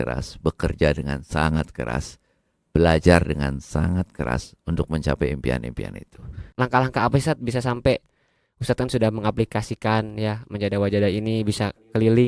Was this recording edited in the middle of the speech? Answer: yes; 1 cut; at 6.5 s

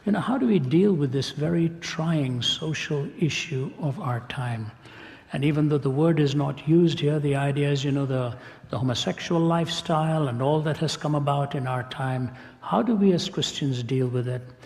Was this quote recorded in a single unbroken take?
no; 1 cut; at 12.4 s

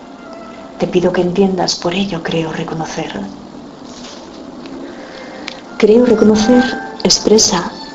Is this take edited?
yes; 1 cut; at 2.6 s

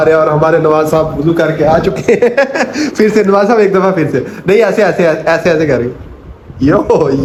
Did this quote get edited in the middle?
no; 0 cuts

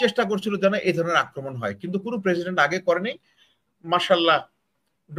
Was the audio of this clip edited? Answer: no; 0 cuts

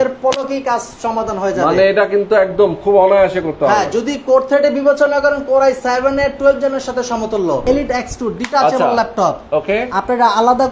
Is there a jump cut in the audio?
yes; 1 cut; at 7.6 s

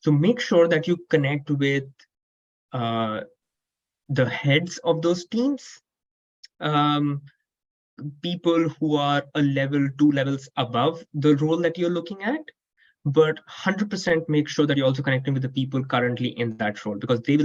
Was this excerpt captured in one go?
yes; 0 cuts

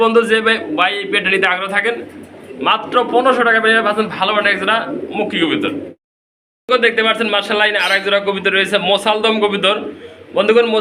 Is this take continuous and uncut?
yes; 0 cuts

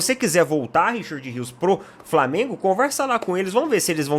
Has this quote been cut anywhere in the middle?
no; 0 cuts

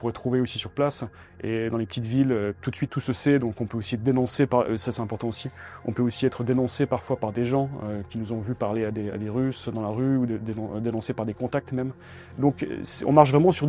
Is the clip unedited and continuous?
yes; 0 cuts

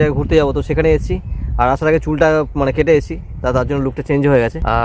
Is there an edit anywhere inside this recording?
no; 0 cuts

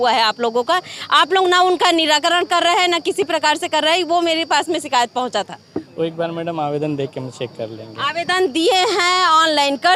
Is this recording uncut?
yes; 0 cuts

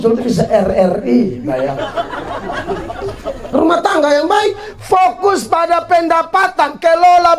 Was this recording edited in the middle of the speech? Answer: yes; 1 cut; at 3.4 s

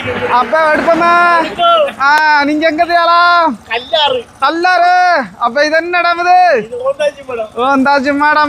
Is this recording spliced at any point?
no; 0 cuts

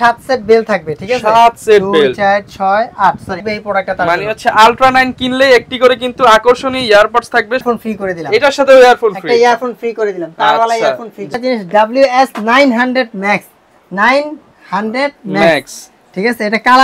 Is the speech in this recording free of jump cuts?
no; 3 cuts; at 3.4 s, 7.6 s, 11.3 s

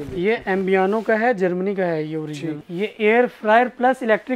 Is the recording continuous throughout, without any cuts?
no; 1 cut; at 2.6 s

